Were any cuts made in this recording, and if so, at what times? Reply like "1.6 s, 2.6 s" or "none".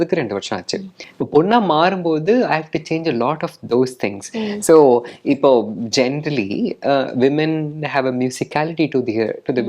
1.0 s